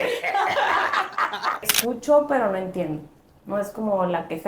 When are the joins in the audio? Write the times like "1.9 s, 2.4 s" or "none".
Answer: 1.6 s